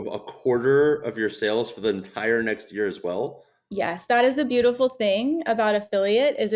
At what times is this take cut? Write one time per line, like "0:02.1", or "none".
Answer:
none